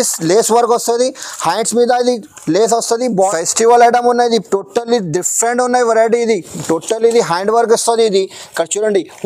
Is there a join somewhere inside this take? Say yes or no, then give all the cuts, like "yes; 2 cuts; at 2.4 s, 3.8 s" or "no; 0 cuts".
yes; 1 cut; at 3.2 s